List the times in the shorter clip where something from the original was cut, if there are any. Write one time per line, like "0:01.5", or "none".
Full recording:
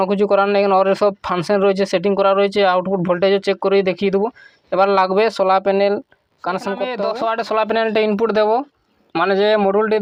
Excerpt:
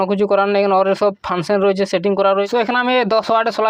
0:02.5